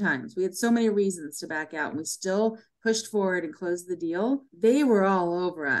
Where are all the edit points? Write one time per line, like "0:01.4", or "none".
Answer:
0:04.5